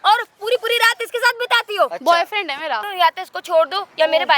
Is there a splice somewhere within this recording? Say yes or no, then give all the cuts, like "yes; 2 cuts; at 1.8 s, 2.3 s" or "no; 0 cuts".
yes; 1 cut; at 2.9 s